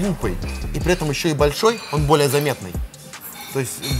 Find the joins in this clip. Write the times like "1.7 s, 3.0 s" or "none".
none